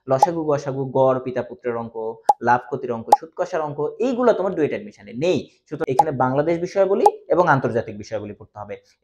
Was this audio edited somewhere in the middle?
yes; 1 cut; at 5.8 s

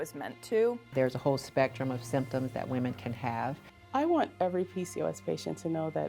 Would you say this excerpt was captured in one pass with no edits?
no; 2 cuts; at 0.9 s, 3.7 s

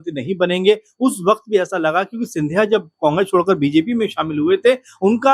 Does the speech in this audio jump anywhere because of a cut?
no; 0 cuts

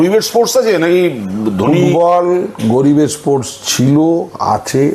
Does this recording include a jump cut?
no; 0 cuts

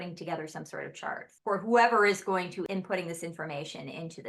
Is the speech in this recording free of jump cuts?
no; 2 cuts; at 1.3 s, 2.7 s

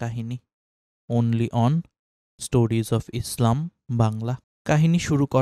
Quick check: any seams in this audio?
yes; 1 cut; at 4.5 s

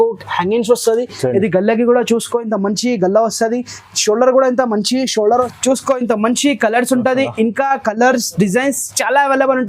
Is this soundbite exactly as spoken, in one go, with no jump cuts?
no; 1 cut; at 5.5 s

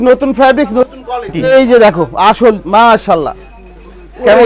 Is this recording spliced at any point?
yes; 1 cut; at 1.5 s

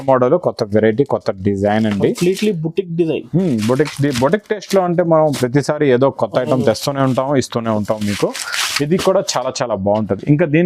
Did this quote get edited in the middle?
no; 0 cuts

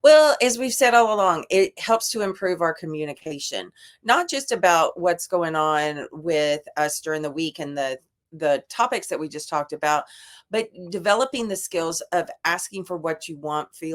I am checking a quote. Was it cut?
no; 0 cuts

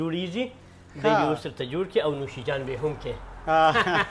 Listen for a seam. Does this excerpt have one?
no; 0 cuts

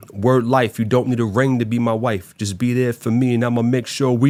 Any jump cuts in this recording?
no; 0 cuts

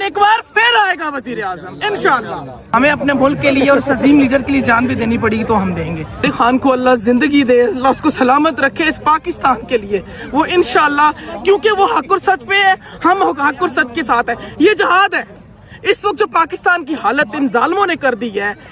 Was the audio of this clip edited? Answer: yes; 2 cuts; at 2.6 s, 6.2 s

